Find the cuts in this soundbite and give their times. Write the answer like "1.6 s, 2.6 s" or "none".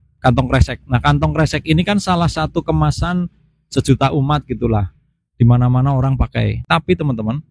6.6 s